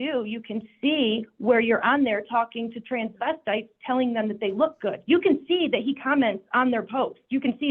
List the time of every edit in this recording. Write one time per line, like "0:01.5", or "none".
none